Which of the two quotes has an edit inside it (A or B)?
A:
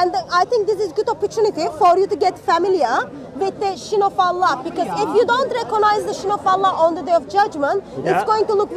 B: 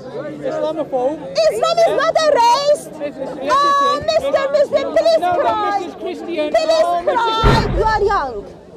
B